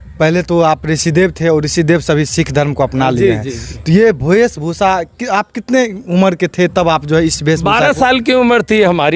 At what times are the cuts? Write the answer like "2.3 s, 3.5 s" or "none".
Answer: none

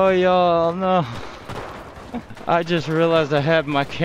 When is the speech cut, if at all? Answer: 2.3 s

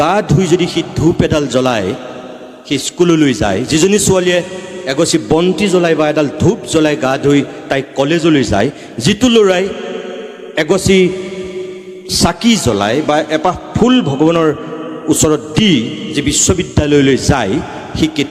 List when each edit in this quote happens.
none

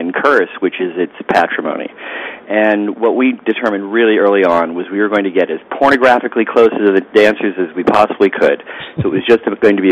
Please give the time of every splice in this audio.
none

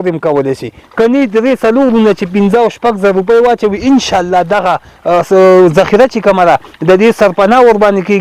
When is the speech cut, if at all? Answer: none

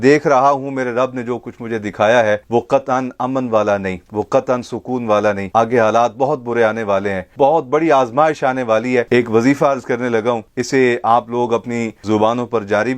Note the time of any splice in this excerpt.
7.2 s, 9.1 s, 11.9 s

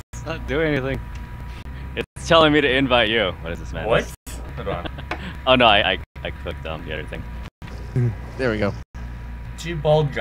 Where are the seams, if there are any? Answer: none

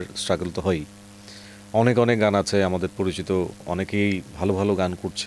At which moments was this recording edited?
none

